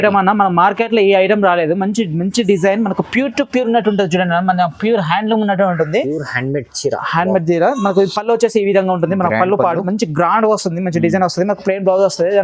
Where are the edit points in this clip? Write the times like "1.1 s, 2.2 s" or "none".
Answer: none